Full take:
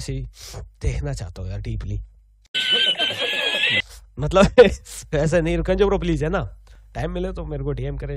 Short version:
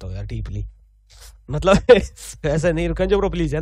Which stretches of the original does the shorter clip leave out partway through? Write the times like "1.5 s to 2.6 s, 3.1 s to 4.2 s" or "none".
2.6 s to 3.9 s